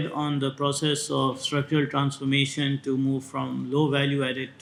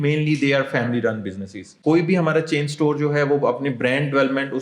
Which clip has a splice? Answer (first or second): second